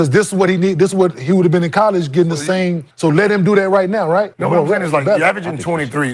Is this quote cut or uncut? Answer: cut